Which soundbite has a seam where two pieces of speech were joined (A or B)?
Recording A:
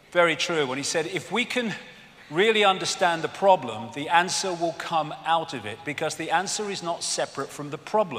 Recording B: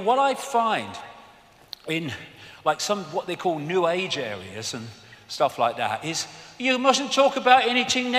A